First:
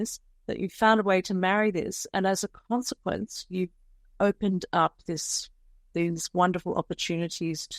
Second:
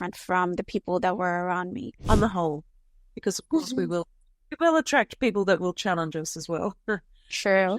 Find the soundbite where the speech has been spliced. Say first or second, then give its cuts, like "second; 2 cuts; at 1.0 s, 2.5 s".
second; 1 cut; at 1.9 s